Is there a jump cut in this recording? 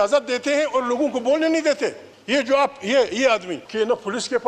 yes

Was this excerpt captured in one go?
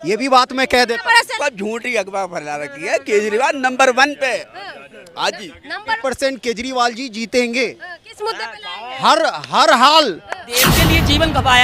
no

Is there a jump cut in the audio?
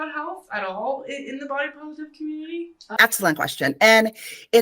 yes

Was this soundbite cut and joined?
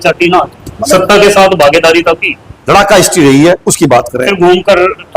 yes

